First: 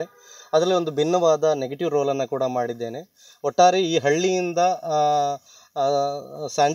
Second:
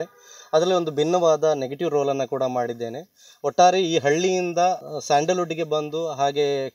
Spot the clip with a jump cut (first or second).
second